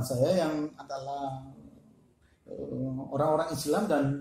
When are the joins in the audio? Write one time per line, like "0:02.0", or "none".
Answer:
none